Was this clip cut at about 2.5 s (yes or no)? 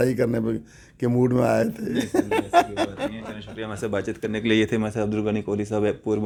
no